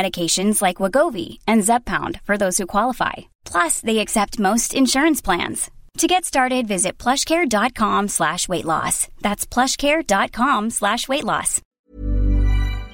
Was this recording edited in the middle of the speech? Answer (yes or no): yes